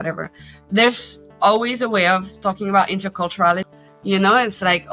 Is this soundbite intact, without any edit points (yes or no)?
no